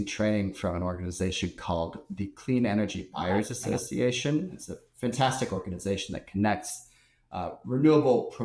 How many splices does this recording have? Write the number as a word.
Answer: zero